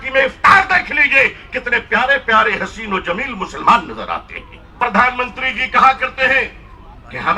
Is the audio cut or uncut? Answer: cut